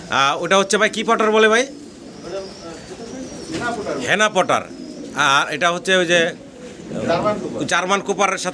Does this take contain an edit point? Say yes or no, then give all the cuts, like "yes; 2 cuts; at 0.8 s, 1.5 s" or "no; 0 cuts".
no; 0 cuts